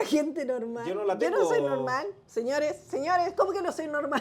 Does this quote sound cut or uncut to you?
uncut